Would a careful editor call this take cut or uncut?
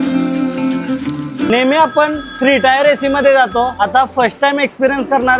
cut